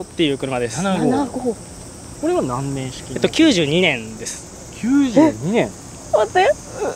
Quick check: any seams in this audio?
no; 0 cuts

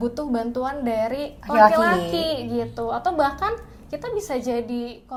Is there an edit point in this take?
no; 0 cuts

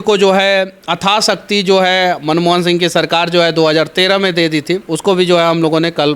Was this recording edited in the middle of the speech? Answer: yes; 1 cut; at 4.9 s

